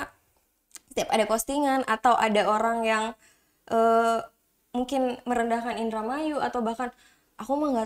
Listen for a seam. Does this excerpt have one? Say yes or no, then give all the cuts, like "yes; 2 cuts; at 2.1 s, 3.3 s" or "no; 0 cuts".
no; 0 cuts